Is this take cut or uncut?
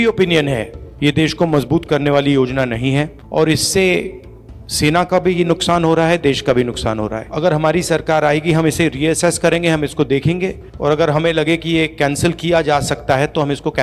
uncut